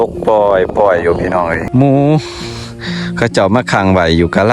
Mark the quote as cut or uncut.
cut